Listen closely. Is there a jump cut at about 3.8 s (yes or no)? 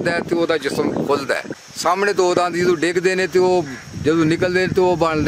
no